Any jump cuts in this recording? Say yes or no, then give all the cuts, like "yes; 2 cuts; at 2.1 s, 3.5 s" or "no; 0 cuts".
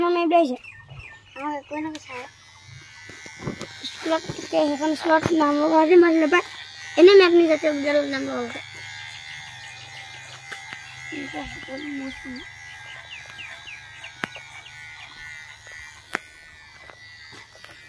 no; 0 cuts